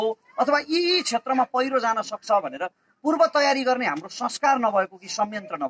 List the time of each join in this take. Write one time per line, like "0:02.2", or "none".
none